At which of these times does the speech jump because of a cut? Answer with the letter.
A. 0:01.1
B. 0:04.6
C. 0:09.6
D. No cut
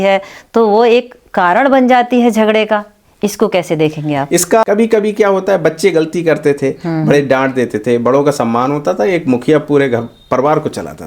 B